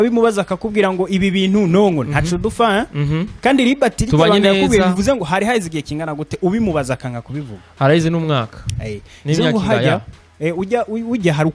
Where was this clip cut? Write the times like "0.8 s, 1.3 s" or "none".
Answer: none